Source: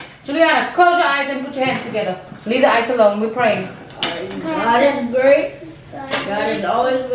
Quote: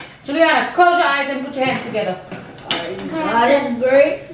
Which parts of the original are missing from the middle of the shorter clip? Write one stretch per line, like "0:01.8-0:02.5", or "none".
0:02.4-0:03.7